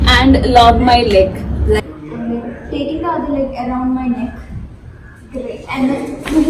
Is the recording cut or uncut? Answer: cut